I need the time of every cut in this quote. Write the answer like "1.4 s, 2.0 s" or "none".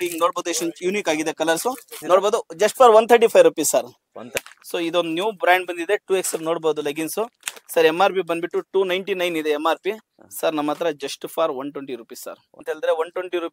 2.0 s, 4.4 s, 12.6 s